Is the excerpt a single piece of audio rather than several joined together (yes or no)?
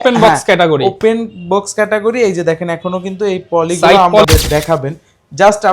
no